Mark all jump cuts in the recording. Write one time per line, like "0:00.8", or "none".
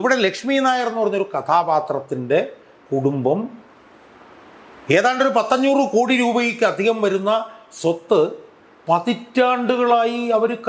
none

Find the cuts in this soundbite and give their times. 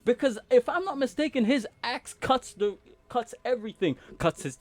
none

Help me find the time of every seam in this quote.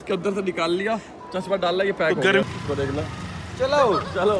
0:02.4

